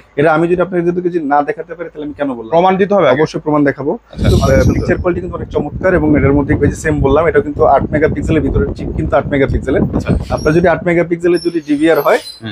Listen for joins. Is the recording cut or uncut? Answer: cut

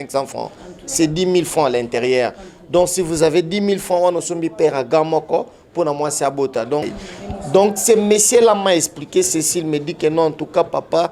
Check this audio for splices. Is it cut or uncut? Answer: cut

